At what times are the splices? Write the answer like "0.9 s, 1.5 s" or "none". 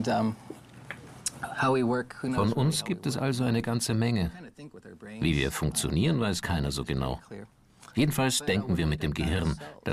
none